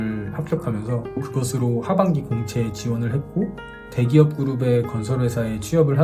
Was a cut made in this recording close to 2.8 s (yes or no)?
no